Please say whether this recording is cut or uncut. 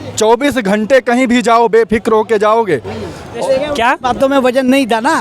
cut